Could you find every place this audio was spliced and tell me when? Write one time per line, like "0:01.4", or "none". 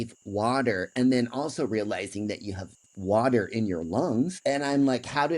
0:04.3